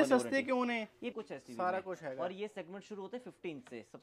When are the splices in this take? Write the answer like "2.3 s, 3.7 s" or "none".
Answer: 1.1 s